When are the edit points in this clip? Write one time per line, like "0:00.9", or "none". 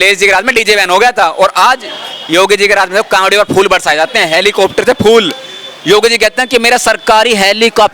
none